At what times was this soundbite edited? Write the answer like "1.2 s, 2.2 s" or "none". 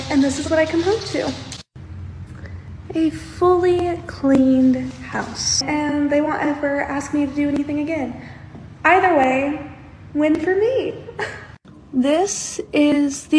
5.6 s